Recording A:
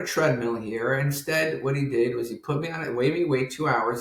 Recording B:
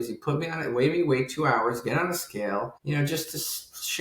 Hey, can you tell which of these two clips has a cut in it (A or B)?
B